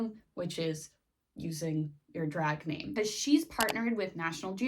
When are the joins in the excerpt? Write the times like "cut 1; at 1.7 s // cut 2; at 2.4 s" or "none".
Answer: cut 1; at 2.9 s